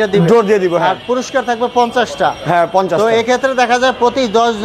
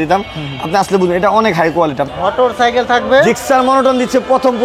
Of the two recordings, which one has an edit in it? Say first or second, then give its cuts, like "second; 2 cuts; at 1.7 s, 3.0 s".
second; 1 cut; at 2.1 s